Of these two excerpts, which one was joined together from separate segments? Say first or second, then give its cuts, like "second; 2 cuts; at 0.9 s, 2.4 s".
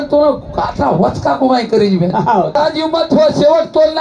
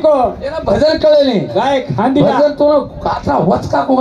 first; 1 cut; at 2.6 s